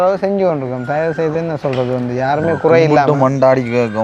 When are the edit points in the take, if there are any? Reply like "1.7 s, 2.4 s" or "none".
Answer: none